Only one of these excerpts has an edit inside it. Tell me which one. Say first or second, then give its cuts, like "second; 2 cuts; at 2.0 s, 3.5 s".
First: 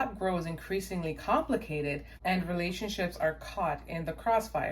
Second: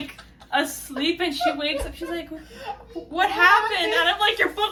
first; 1 cut; at 2.1 s